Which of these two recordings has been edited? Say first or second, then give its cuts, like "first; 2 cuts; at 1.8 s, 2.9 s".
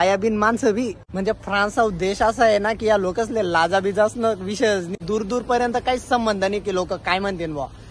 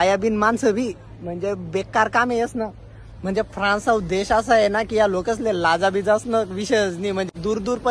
first; 2 cuts; at 1.0 s, 4.9 s